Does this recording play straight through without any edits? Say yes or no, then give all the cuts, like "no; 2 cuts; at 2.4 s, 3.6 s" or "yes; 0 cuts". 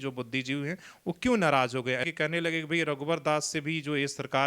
no; 1 cut; at 2.1 s